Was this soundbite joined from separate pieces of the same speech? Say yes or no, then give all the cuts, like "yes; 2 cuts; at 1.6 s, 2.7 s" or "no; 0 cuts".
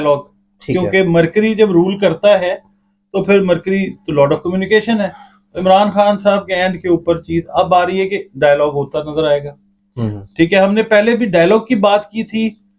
no; 0 cuts